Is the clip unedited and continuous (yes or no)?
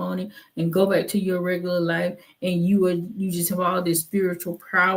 yes